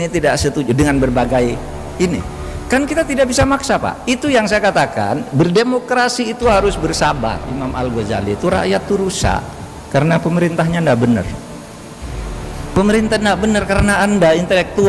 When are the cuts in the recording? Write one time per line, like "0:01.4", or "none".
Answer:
0:07.5